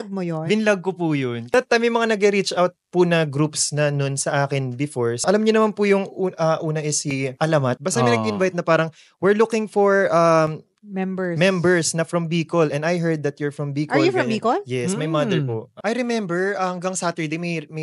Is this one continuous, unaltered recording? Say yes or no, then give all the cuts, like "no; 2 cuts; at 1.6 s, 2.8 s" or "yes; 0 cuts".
no; 4 cuts; at 1.4 s, 5.2 s, 7.8 s, 15.7 s